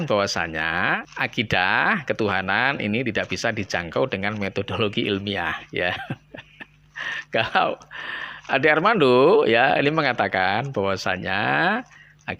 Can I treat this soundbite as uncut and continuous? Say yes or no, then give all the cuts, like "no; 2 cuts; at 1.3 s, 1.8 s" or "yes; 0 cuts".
no; 1 cut; at 1.1 s